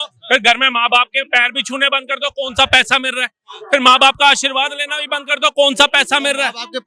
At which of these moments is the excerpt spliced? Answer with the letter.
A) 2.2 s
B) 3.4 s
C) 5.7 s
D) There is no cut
D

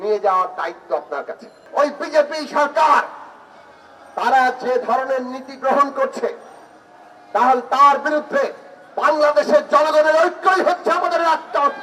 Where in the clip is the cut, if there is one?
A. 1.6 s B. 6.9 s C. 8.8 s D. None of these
A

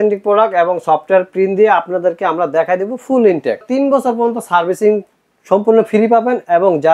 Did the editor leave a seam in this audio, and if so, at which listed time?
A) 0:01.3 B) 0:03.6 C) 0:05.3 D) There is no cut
B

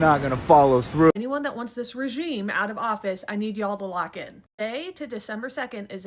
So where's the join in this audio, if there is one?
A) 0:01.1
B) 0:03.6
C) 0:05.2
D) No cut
A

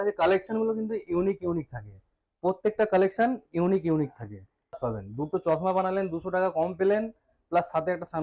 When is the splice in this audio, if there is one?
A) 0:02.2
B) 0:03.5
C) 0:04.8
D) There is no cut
C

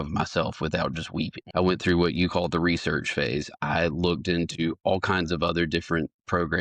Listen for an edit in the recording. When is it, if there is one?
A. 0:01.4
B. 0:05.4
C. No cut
A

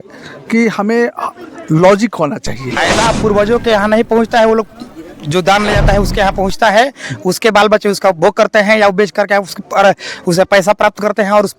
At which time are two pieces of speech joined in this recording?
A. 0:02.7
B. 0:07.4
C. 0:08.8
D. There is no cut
A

